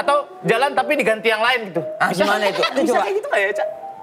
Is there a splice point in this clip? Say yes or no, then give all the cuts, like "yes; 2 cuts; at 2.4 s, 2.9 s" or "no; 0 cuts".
yes; 1 cut; at 2.7 s